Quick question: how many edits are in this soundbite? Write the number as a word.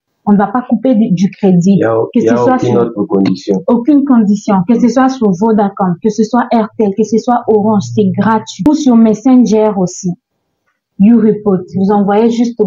one